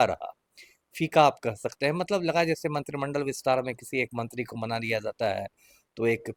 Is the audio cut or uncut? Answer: uncut